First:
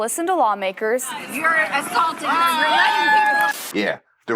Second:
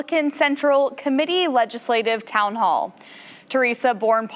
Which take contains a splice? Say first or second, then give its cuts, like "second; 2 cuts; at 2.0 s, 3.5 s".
first; 2 cuts; at 1.2 s, 3.6 s